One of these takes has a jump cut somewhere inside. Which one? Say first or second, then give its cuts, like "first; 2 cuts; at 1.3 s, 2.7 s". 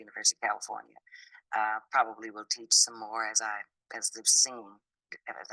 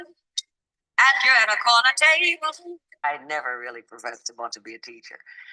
second; 1 cut; at 2.8 s